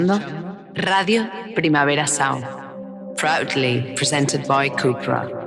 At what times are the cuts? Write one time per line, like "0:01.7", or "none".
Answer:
none